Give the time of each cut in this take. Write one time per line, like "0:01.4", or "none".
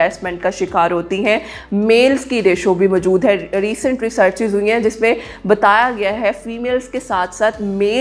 none